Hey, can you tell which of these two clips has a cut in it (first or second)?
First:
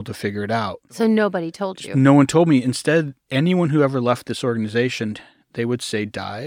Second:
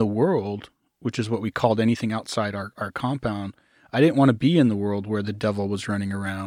first